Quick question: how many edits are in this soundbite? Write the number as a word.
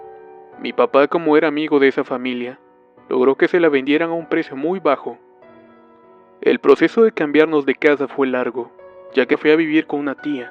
zero